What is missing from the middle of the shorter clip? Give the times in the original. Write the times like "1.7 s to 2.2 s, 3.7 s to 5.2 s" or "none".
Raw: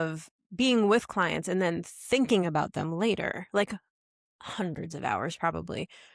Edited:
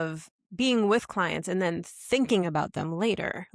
none

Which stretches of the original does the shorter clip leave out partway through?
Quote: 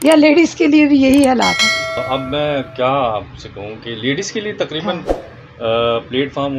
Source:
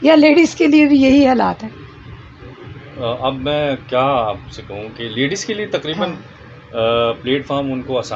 2.0 s to 3.2 s

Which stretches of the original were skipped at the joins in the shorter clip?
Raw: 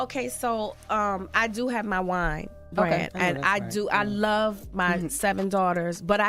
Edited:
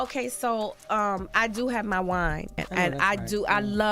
2.7 s to 3.1 s

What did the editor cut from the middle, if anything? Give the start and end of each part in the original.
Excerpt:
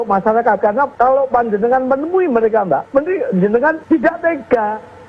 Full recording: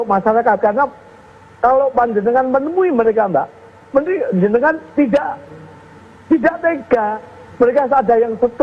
0.9 s to 1.5 s, 3.5 s to 3.9 s, 4.8 s to 6.2 s

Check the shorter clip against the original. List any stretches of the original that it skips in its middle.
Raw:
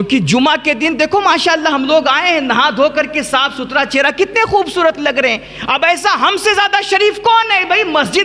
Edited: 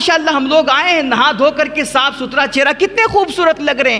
none

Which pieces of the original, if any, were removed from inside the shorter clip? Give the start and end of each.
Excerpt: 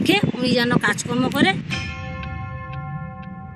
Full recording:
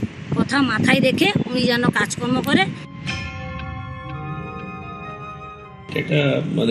2.8 s to 3.0 s

